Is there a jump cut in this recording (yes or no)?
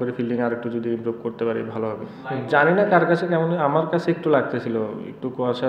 yes